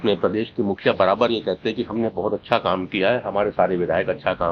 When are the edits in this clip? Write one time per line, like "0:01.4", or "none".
none